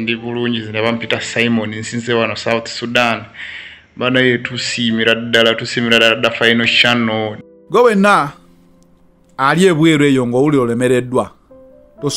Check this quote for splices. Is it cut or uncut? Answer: cut